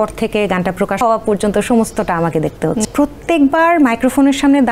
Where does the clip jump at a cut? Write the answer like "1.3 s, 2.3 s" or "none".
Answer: 0.9 s, 2.8 s